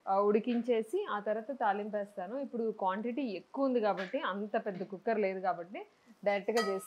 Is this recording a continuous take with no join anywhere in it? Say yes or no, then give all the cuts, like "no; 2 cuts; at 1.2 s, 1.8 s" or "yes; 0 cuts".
yes; 0 cuts